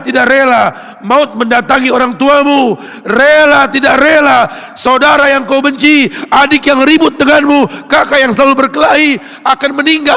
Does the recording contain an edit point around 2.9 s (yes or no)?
no